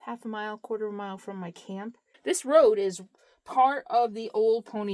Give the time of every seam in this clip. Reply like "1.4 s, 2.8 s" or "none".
2.1 s